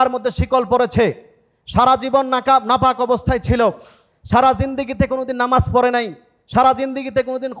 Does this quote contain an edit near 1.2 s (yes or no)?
no